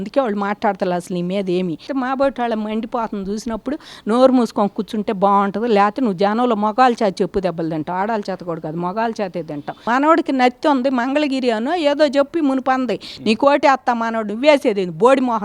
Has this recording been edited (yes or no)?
yes